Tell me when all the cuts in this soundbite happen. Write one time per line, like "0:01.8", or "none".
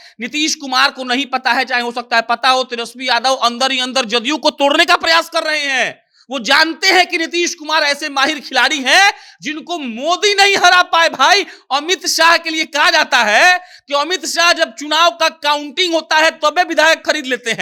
none